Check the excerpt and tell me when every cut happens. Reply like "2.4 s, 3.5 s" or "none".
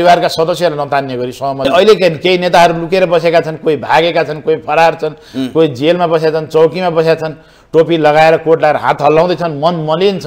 1.6 s

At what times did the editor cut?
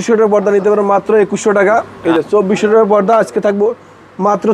1.9 s

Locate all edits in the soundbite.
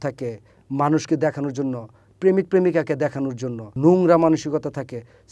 3.7 s

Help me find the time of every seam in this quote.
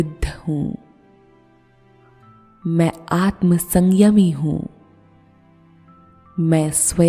1.1 s, 2.6 s, 4.8 s, 6.3 s

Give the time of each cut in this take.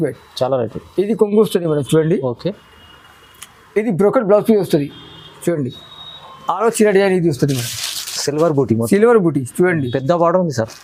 none

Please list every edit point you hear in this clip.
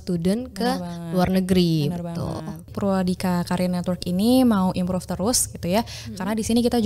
2.7 s

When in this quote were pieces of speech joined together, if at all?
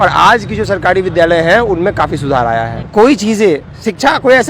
2.8 s

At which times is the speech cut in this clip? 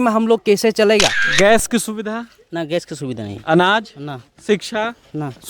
1.2 s

